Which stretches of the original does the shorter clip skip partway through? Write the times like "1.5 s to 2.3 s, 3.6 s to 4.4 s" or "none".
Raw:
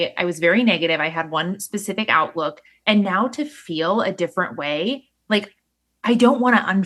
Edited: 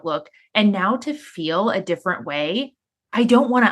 5.1 s to 5.7 s